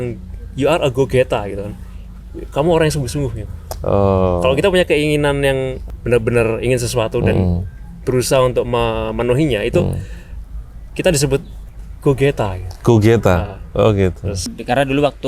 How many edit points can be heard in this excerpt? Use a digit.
2